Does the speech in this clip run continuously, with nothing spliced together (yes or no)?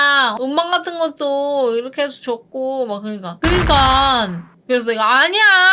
yes